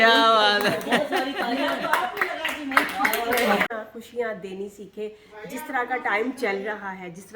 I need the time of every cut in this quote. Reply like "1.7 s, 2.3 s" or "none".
3.7 s